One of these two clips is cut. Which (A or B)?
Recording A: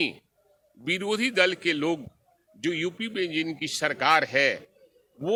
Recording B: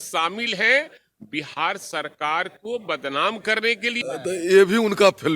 B